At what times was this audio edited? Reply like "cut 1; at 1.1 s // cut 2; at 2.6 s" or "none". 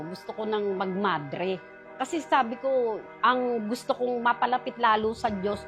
cut 1; at 1.8 s